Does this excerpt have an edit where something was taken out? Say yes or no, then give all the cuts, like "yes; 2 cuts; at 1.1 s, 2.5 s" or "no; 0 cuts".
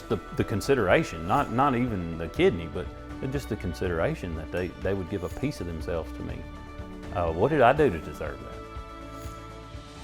no; 0 cuts